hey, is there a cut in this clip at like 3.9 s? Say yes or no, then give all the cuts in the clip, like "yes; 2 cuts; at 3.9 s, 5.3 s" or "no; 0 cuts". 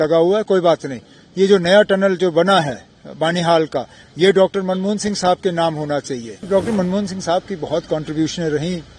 no; 1 cut; at 6.5 s